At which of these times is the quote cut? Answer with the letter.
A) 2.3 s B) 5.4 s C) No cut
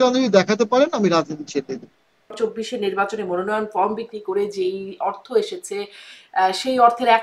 A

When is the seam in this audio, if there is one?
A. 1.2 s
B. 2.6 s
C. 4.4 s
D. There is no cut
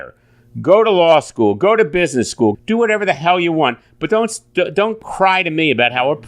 B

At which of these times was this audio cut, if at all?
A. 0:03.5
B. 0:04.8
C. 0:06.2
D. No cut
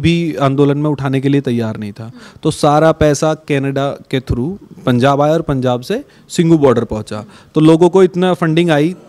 D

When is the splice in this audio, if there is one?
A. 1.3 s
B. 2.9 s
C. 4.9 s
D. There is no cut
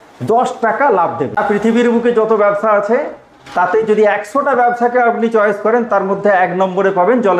A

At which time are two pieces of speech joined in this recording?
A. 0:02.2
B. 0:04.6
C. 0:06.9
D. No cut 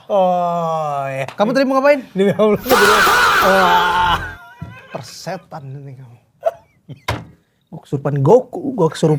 C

